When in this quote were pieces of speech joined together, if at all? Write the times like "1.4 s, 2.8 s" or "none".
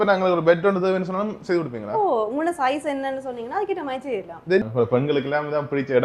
4.6 s